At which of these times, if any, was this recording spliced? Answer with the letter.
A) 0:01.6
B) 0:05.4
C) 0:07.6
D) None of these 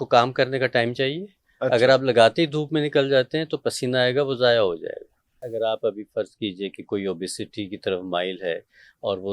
B